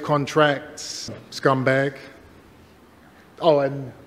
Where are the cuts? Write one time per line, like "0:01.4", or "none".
0:01.0
0:03.1